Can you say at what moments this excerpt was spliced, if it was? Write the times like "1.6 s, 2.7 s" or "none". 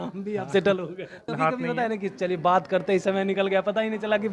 1.3 s